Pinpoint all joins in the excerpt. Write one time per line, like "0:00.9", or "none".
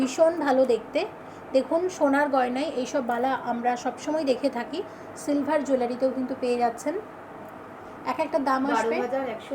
none